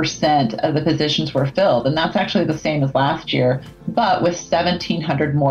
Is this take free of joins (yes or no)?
yes